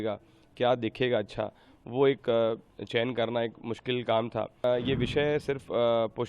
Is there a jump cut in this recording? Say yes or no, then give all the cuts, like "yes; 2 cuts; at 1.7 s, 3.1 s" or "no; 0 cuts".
yes; 1 cut; at 4.6 s